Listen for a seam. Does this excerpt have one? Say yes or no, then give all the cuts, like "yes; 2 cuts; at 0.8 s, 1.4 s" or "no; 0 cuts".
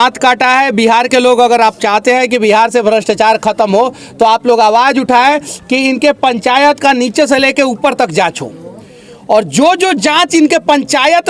no; 0 cuts